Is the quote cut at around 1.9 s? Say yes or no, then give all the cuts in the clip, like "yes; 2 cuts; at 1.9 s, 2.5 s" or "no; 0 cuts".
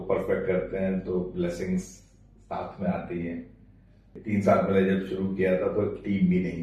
no; 1 cut; at 4.1 s